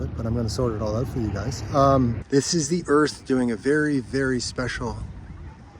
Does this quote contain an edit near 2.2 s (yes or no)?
yes